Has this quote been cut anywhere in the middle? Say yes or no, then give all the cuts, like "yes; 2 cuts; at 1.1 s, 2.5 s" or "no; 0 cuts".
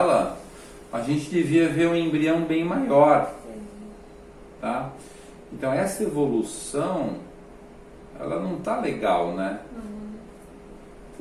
no; 0 cuts